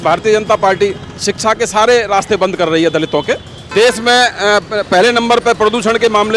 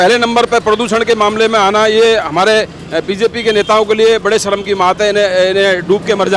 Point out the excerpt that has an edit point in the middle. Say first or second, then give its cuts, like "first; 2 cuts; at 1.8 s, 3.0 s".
first; 1 cut; at 3.7 s